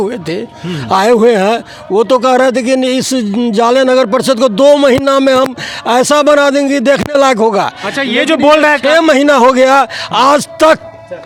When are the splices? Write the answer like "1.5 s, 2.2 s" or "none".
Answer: none